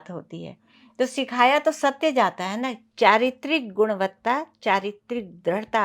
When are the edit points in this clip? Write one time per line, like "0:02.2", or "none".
0:02.8